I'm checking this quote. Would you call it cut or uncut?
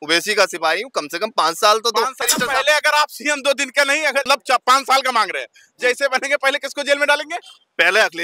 cut